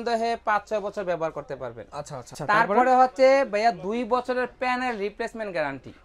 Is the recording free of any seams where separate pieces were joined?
no; 1 cut; at 2.4 s

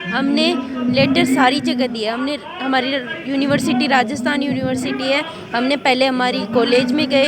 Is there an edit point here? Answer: no; 0 cuts

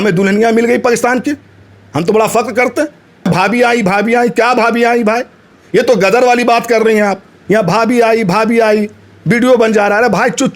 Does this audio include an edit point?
yes; 2 cuts; at 3.2 s, 7.4 s

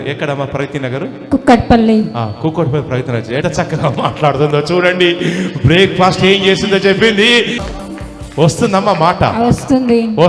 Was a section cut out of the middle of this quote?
yes; 2 cuts; at 3.4 s, 7.6 s

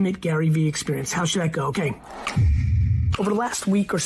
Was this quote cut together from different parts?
no; 0 cuts

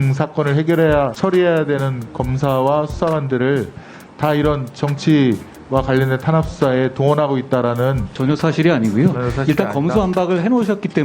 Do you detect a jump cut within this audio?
yes; 2 cuts; at 1.1 s, 8.1 s

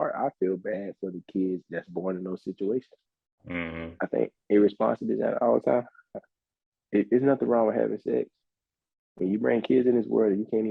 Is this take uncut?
yes; 0 cuts

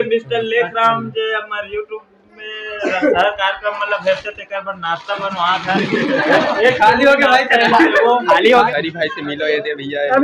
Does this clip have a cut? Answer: yes; 1 cut; at 8.5 s

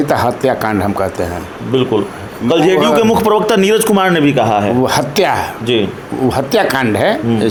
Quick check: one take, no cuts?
yes; 0 cuts

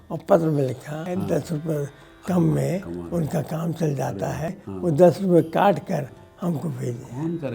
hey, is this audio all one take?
no; 2 cuts; at 1.0 s, 4.7 s

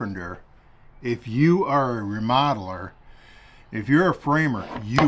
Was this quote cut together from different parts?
no; 0 cuts

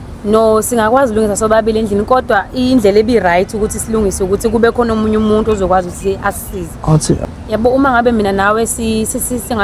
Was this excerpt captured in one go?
no; 1 cut; at 7.2 s

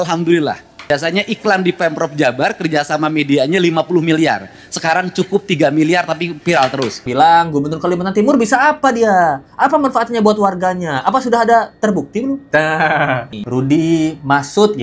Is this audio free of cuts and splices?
no; 3 cuts; at 0.9 s, 7.0 s, 13.3 s

